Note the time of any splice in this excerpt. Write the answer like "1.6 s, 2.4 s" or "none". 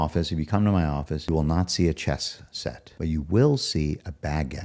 1.2 s, 2.9 s